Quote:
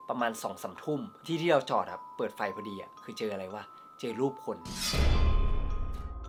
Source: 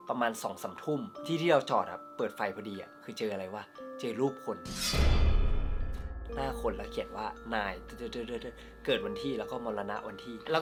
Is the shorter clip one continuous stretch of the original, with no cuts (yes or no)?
yes